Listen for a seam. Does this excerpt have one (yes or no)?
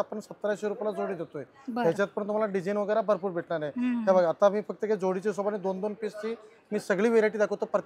no